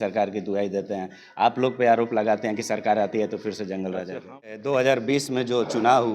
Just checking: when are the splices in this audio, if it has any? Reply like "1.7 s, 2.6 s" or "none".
4.5 s